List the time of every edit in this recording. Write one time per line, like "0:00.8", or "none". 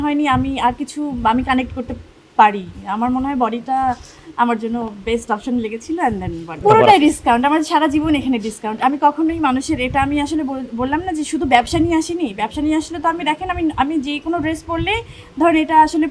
0:06.6